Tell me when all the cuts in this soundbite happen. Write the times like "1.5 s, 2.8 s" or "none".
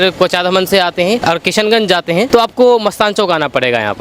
1.2 s, 2.3 s